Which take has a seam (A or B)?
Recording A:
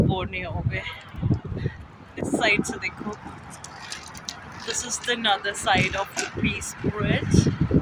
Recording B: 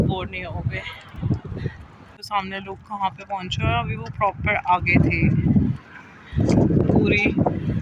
B